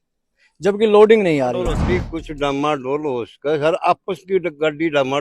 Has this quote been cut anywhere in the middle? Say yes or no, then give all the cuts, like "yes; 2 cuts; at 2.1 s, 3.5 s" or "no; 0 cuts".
yes; 1 cut; at 1.8 s